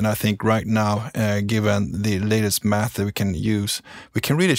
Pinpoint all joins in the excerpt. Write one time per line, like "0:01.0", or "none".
none